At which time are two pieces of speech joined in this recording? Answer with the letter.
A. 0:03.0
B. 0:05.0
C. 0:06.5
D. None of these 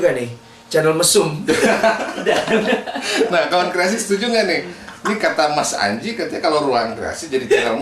D